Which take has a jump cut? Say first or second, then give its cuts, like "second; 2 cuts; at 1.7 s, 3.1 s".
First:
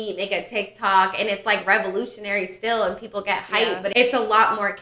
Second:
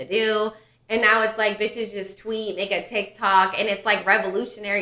first; 1 cut; at 3.9 s